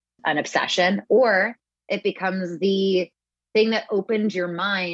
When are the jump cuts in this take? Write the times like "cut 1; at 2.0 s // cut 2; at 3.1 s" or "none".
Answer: none